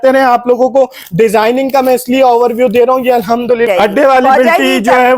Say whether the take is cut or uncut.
cut